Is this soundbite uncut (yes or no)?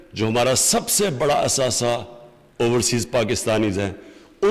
yes